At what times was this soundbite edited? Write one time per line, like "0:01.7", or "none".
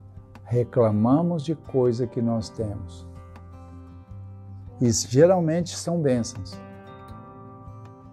0:02.8
0:04.3
0:06.2

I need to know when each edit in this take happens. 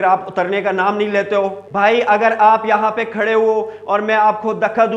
0:01.6

